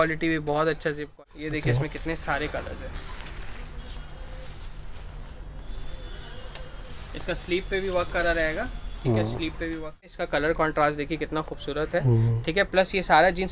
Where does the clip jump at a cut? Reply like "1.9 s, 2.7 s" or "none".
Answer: 1.2 s, 10.1 s